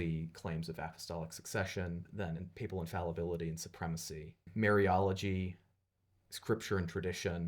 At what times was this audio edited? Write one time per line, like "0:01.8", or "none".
0:02.1
0:04.4